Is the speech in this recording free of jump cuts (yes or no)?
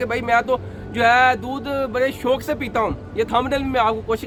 yes